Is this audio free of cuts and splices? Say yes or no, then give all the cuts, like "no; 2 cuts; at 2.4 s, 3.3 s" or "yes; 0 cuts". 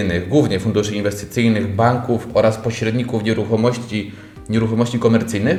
yes; 0 cuts